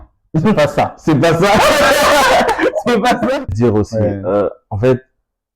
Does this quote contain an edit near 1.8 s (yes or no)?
no